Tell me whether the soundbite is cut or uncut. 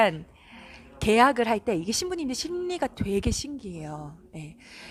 uncut